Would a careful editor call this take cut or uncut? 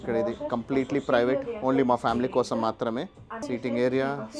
cut